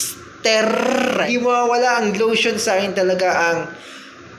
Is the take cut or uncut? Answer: cut